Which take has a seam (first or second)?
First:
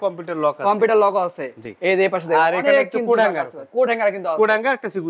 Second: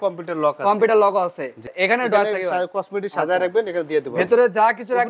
second